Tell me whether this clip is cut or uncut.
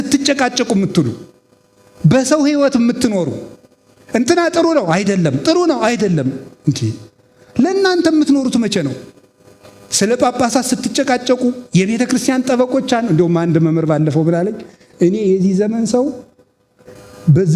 uncut